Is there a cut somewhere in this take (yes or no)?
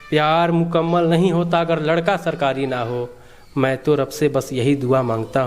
no